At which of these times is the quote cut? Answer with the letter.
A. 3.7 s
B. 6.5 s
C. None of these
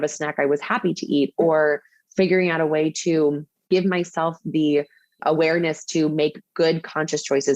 A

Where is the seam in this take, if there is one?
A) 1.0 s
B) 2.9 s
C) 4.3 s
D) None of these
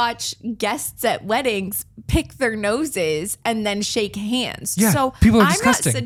D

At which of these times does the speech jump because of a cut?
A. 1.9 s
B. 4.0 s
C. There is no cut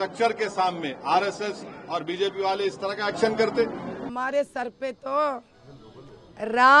B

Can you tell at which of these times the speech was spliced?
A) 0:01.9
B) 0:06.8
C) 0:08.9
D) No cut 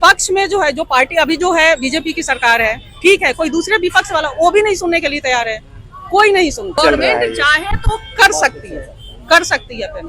B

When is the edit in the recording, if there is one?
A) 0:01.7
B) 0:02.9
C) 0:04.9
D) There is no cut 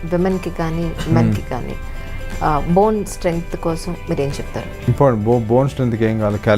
C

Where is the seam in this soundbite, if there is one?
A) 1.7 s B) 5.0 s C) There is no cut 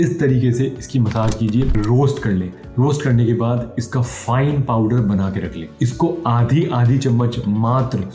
A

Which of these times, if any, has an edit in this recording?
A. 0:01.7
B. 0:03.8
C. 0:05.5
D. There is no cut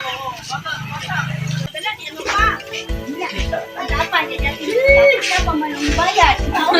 A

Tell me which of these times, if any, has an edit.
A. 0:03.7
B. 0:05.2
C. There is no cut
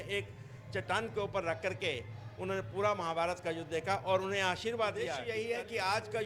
B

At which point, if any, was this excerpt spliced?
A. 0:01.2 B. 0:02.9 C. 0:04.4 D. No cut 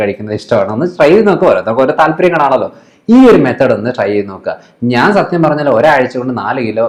D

